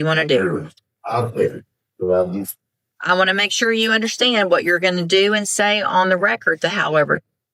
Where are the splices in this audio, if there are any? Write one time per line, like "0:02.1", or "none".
none